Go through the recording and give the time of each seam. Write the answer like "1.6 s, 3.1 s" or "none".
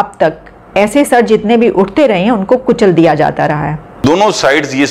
4.0 s